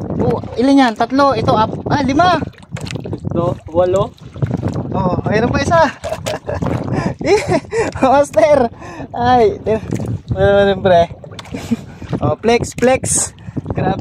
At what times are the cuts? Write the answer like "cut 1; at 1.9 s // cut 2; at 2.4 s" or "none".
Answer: none